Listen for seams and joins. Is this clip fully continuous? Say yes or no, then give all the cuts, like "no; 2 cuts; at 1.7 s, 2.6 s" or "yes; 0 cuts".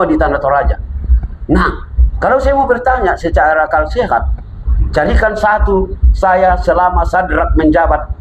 yes; 0 cuts